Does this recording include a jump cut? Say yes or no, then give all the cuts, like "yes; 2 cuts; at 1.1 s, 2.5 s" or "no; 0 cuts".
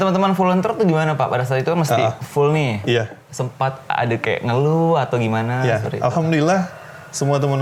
no; 0 cuts